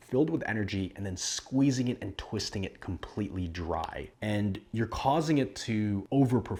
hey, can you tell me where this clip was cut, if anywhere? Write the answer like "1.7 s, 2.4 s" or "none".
none